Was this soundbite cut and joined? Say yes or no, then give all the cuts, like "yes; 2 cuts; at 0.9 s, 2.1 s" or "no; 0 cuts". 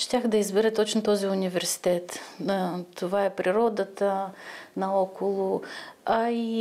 no; 0 cuts